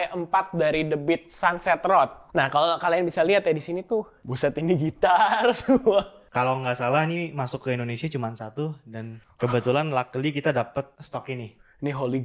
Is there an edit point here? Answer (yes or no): yes